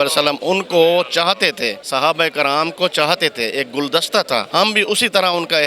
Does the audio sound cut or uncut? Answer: cut